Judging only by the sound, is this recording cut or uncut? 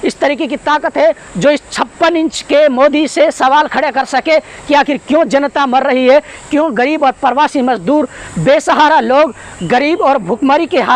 uncut